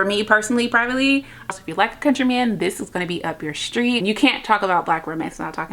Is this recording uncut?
no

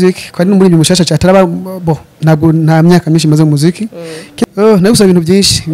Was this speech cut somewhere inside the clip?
yes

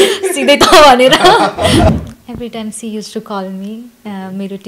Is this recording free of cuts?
no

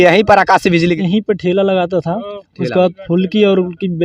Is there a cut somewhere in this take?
yes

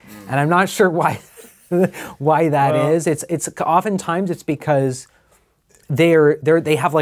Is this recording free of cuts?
yes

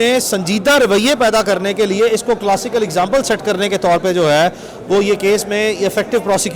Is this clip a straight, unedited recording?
yes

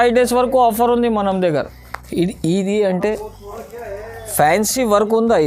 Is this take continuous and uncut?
yes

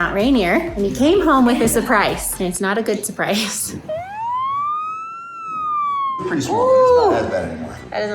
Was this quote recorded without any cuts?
no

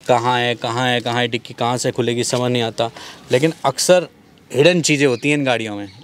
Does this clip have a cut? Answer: no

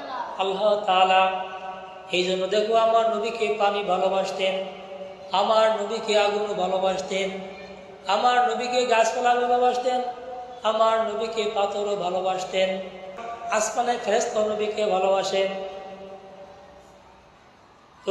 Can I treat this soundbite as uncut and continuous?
no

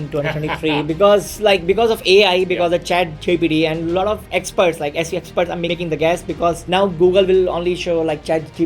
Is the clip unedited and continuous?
no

